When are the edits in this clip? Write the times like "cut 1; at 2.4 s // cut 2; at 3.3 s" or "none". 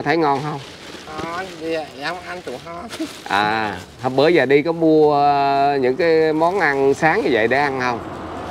none